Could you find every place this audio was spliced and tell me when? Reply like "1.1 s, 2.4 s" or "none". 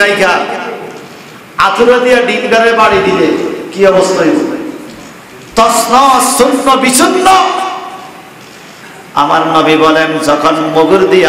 none